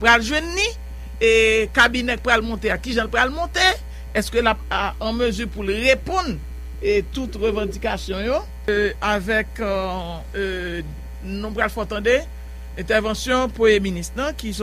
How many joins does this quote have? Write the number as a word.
one